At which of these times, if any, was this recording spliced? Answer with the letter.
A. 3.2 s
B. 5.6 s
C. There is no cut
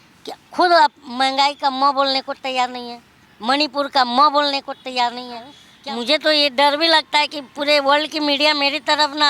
B